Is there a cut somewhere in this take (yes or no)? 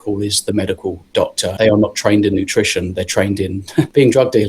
yes